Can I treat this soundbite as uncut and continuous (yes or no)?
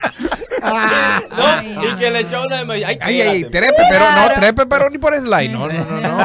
yes